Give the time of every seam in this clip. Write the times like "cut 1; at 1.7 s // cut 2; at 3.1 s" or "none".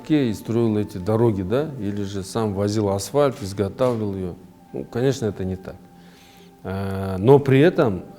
none

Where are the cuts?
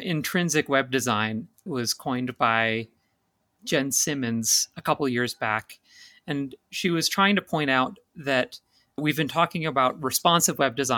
cut 1; at 1.6 s // cut 2; at 3.5 s // cut 3; at 9.0 s

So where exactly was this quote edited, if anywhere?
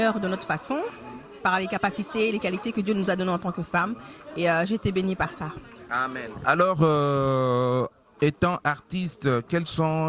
none

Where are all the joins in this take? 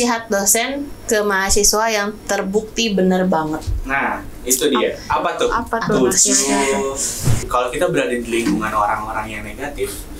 cut 1; at 7.5 s

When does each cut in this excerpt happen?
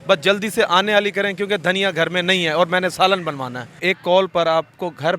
cut 1; at 3.7 s

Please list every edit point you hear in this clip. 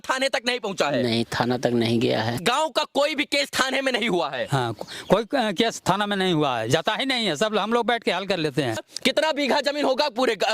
cut 1; at 2.3 s // cut 2; at 8.8 s

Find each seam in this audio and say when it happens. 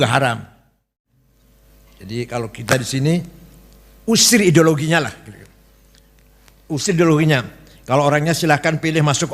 cut 1; at 1.3 s

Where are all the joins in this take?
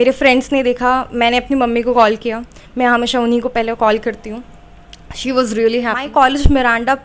cut 1; at 6.0 s

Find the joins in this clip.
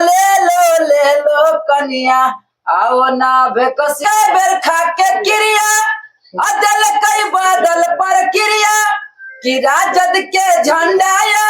cut 1; at 4.0 s

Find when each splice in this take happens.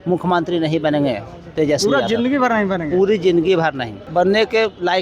cut 1; at 4.0 s

